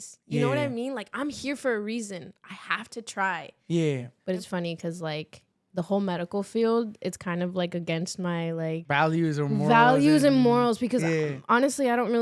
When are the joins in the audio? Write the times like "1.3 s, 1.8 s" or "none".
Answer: 4.1 s, 8.8 s